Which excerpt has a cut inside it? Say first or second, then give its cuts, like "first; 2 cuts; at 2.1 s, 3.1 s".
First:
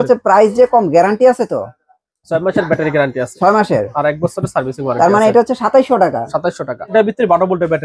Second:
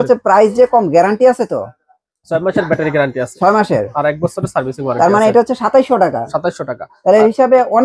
first; 1 cut; at 6.9 s